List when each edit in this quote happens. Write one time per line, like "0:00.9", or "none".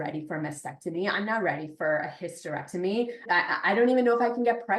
0:03.2